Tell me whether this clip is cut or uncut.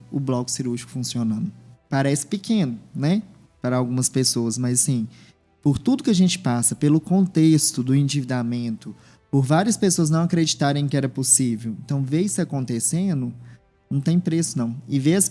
uncut